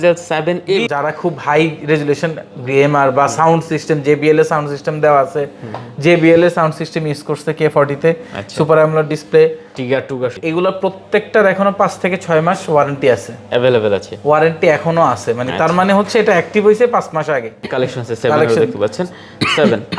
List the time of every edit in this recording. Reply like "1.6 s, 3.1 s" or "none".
0.8 s, 10.3 s, 17.7 s